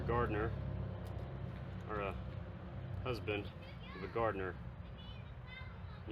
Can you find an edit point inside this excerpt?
no; 0 cuts

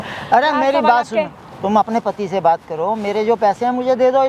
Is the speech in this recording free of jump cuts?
yes; 0 cuts

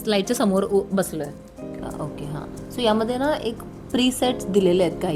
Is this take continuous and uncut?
no; 1 cut; at 1.7 s

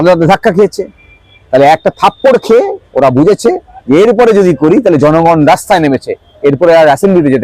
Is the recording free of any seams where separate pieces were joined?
yes; 0 cuts

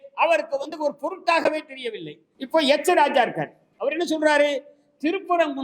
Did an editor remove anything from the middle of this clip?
yes; 2 cuts; at 2.3 s, 3.7 s

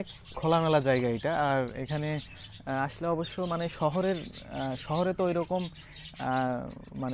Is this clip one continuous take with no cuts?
yes; 0 cuts

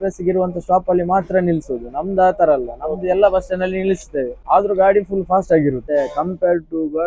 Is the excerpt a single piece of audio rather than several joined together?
no; 2 cuts; at 4.3 s, 5.8 s

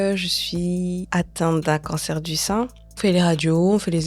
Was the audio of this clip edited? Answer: yes; 2 cuts; at 1.1 s, 2.8 s

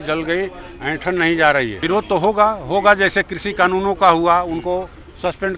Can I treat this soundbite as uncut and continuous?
no; 1 cut; at 1.8 s

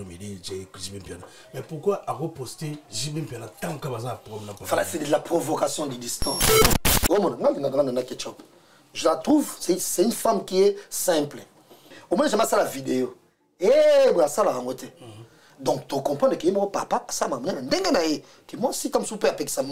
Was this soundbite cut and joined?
yes; 2 cuts; at 6.6 s, 12.0 s

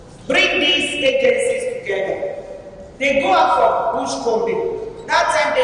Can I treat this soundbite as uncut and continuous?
yes; 0 cuts

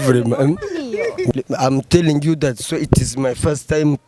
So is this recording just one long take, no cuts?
no; 1 cut; at 1.3 s

